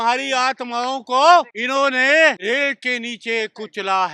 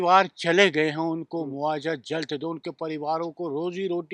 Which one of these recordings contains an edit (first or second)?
first